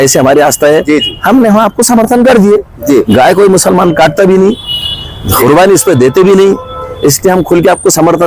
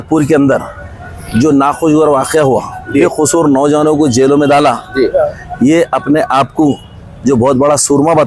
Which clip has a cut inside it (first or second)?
second